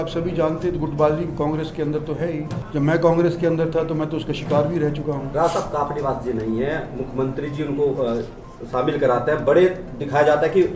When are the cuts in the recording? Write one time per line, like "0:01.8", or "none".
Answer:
0:02.6
0:05.2